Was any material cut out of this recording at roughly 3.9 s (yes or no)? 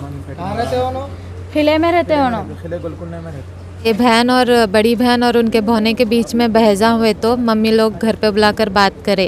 yes